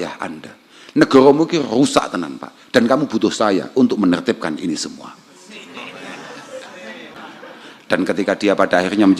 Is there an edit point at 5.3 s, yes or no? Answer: no